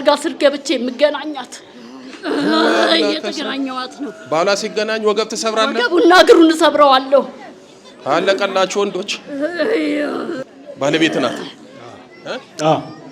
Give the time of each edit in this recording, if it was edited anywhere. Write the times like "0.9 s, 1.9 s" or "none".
10.4 s